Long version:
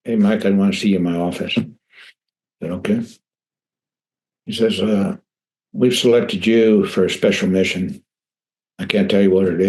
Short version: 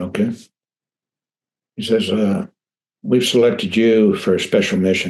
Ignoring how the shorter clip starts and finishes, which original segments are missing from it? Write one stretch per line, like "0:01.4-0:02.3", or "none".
none